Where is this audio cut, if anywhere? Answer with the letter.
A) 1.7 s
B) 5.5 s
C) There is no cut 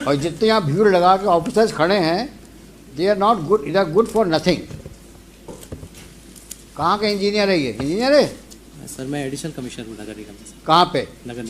B